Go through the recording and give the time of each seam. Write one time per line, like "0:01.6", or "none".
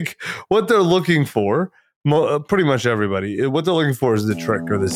none